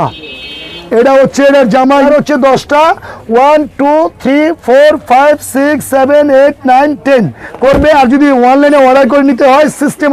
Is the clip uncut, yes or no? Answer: no